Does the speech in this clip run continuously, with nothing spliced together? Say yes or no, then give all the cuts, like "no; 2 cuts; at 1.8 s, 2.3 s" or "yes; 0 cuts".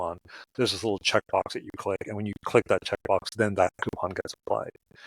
yes; 0 cuts